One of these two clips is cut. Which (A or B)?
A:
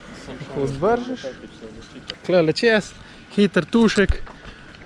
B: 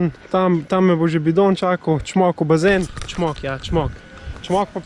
A